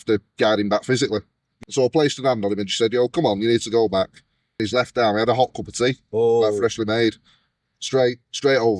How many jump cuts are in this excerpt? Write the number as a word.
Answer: one